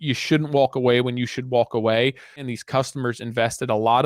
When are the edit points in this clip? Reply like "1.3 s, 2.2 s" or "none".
2.5 s